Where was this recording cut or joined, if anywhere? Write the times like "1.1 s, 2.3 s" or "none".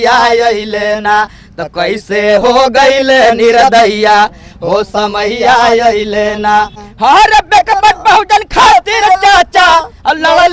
6.8 s